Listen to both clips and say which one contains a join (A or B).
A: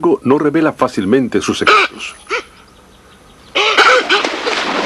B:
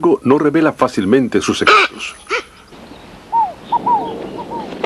A